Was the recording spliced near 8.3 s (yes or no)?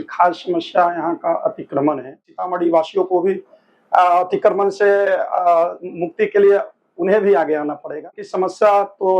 yes